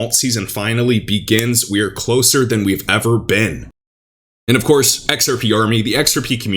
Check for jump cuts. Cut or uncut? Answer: uncut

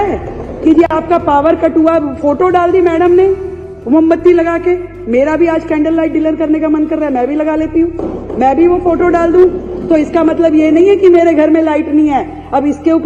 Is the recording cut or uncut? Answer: uncut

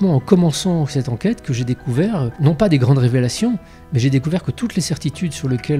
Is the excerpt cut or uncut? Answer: cut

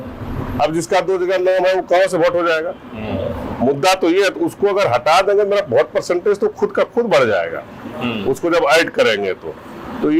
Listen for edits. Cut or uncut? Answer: uncut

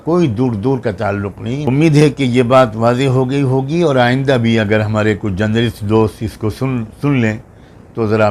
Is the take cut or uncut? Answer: cut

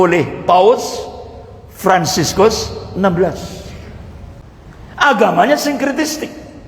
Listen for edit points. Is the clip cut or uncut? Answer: cut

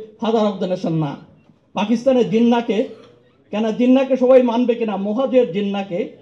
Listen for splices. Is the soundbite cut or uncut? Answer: uncut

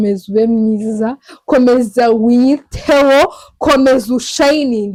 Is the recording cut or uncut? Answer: uncut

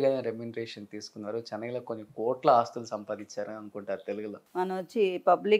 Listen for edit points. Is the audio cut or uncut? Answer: cut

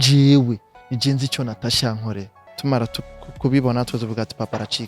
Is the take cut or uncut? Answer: cut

